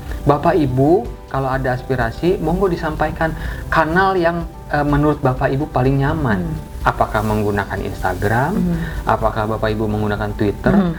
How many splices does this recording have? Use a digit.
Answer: 0